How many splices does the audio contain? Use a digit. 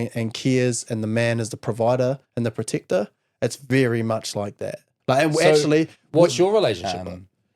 2